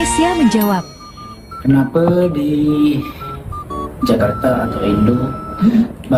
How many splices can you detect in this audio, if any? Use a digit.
0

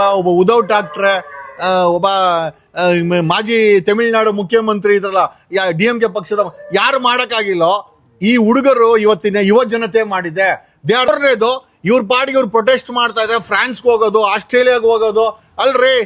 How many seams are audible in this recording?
1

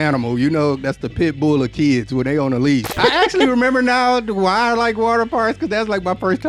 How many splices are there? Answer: 1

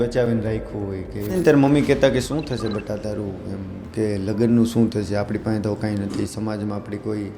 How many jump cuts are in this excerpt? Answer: 1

